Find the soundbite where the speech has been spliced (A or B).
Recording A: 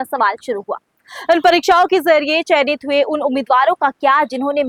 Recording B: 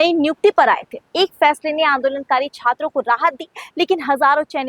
B